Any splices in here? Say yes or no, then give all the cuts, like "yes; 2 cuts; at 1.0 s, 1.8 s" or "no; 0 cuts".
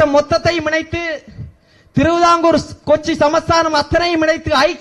no; 0 cuts